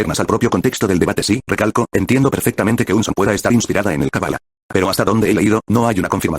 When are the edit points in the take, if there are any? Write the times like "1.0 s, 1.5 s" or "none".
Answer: 1.4 s

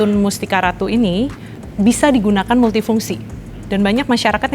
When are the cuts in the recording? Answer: 1.6 s

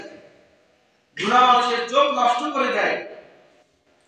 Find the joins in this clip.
none

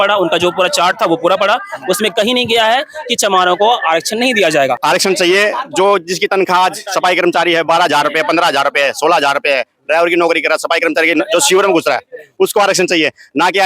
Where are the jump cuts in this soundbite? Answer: 4.8 s

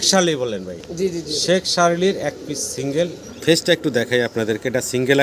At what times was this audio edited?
3.2 s

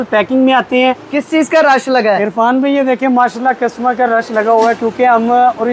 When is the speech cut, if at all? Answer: 1.1 s

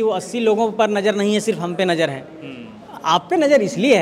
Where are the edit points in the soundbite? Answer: none

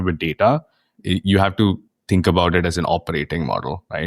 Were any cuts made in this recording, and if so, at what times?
1.0 s

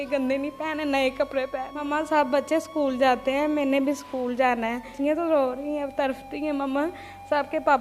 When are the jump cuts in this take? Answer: 1.7 s, 4.9 s

